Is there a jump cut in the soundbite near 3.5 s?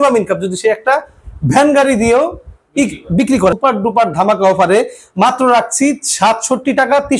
yes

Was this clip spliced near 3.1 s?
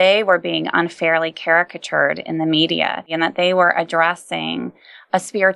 yes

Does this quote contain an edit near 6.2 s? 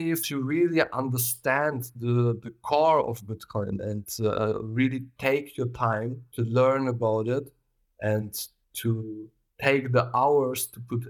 yes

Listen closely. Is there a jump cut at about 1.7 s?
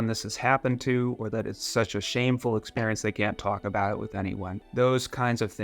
no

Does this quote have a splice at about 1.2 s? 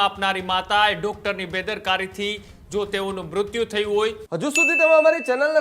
no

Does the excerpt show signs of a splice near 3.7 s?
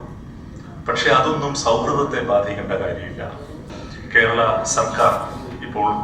yes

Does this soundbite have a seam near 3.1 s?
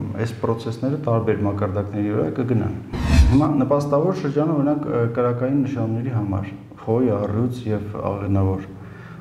yes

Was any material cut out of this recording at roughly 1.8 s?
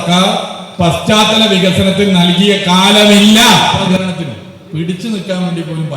no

